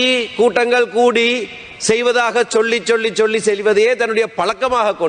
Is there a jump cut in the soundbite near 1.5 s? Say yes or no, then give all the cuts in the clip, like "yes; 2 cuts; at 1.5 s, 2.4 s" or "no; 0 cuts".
no; 0 cuts